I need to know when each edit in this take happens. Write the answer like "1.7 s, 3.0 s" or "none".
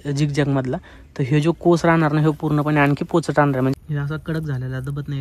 3.7 s